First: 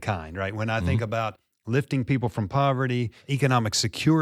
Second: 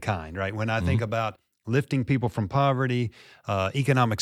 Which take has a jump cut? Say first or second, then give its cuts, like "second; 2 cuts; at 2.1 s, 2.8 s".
first; 1 cut; at 3.3 s